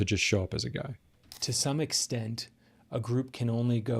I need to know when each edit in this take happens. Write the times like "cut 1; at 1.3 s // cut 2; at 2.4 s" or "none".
cut 1; at 1.4 s